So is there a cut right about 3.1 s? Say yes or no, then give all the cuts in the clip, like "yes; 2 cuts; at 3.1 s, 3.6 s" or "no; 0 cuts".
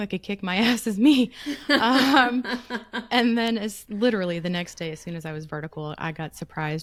no; 0 cuts